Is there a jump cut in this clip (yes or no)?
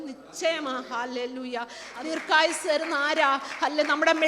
yes